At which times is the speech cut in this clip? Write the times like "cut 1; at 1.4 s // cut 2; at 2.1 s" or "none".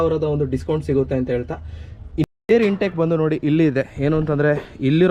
cut 1; at 2.5 s